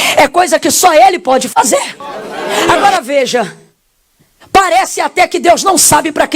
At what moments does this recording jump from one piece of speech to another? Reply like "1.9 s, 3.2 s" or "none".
2.7 s